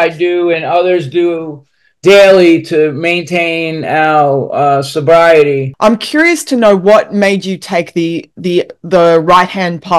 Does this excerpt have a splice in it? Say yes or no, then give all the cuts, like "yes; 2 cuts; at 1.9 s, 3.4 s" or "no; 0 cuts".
yes; 1 cut; at 5.7 s